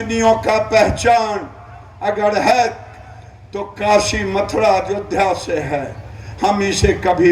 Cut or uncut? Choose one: uncut